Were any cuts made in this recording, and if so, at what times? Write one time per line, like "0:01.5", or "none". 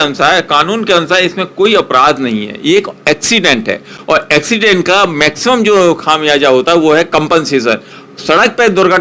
none